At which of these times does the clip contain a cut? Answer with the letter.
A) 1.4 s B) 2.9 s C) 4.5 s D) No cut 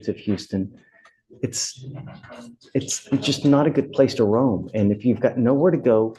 D